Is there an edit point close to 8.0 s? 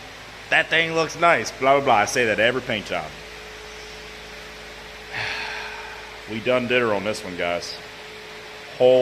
yes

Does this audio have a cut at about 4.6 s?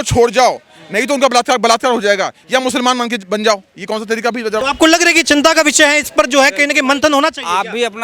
yes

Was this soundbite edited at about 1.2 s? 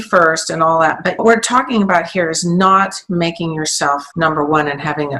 yes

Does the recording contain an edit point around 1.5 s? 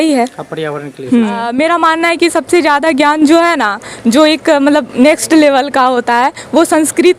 yes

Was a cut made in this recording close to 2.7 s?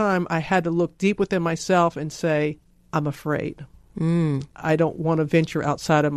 yes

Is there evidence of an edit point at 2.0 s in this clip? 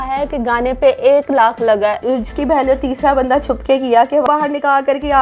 yes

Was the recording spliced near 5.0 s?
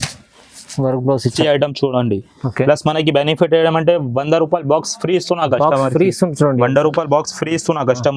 no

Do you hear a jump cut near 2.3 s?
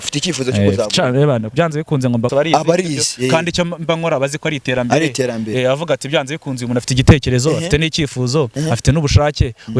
yes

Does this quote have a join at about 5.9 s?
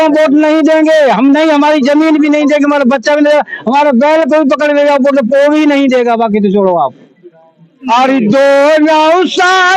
no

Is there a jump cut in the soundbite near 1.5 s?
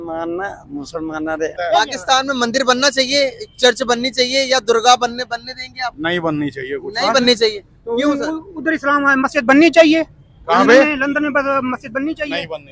yes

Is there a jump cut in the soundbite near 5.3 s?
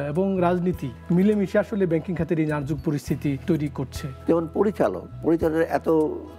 no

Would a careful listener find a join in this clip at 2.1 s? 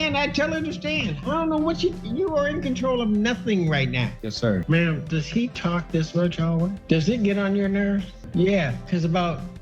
no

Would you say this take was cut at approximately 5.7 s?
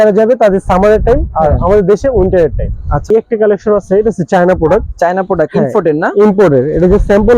no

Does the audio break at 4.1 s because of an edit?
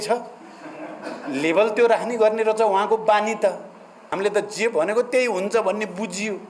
yes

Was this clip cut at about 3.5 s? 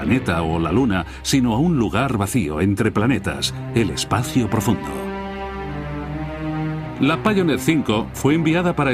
yes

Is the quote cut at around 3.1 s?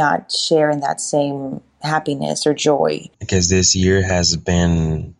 yes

